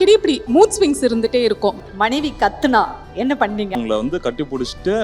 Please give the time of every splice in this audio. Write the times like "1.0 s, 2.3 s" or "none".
1.9 s, 3.8 s